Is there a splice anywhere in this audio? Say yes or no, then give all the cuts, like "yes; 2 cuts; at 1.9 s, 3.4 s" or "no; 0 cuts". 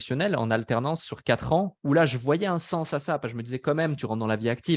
yes; 1 cut; at 1.8 s